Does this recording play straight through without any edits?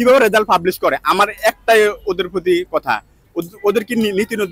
yes; 0 cuts

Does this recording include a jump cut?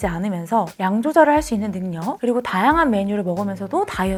no; 0 cuts

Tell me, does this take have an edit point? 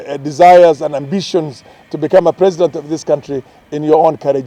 no; 0 cuts

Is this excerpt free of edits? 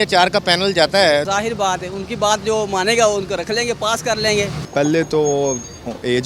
no; 2 cuts; at 1.3 s, 4.6 s

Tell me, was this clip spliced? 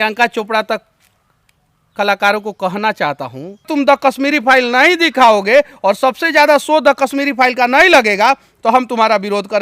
yes; 1 cut; at 3.7 s

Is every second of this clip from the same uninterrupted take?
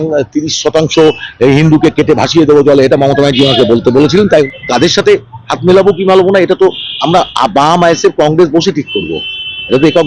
no; 1 cut; at 4.5 s

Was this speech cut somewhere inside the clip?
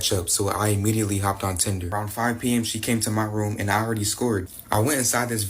yes; 2 cuts; at 1.8 s, 4.5 s

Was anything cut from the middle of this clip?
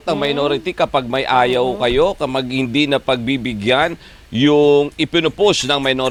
no; 0 cuts

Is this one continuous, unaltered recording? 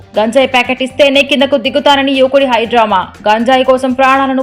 yes; 0 cuts

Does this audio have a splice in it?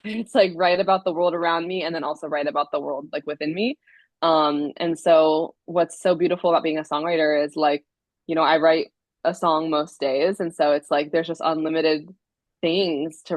no; 0 cuts

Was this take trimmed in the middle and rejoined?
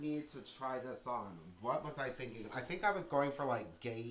no; 0 cuts

